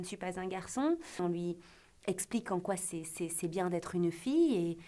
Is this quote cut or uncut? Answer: cut